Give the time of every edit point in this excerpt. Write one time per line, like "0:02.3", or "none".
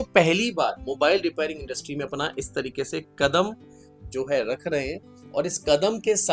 none